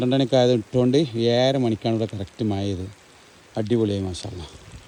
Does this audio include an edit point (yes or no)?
no